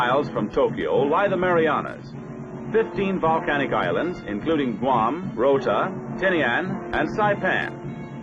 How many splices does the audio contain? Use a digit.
1